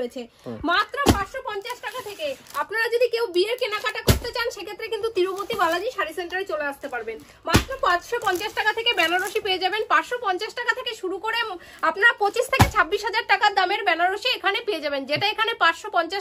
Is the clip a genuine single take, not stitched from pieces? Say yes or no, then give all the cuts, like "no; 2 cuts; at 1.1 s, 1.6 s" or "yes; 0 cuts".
yes; 0 cuts